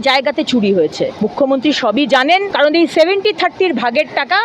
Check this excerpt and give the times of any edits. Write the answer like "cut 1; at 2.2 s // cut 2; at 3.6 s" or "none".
cut 1; at 1.1 s // cut 2; at 2.5 s